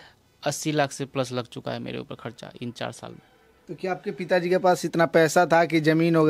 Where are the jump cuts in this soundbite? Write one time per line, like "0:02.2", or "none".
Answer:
none